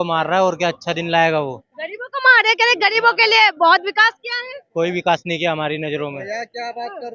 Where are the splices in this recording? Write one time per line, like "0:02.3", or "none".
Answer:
none